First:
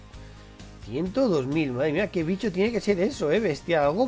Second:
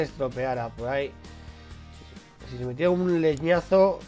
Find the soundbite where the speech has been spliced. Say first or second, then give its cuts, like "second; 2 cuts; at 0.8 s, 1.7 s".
first; 1 cut; at 2.0 s